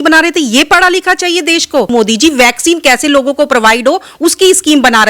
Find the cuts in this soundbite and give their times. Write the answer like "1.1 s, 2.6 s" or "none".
1.9 s